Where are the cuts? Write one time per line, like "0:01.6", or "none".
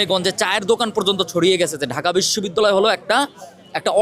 none